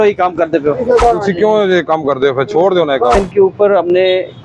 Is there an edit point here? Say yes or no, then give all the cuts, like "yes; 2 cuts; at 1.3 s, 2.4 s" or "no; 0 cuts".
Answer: yes; 2 cuts; at 1.0 s, 3.2 s